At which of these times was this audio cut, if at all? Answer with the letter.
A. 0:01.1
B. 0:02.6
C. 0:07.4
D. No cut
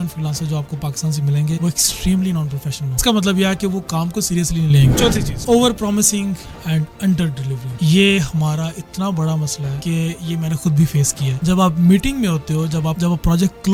D